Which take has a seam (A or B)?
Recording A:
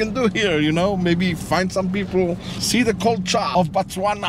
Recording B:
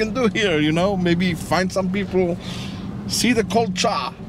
A